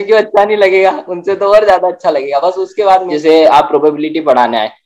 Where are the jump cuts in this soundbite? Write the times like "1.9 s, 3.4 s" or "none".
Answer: 3.1 s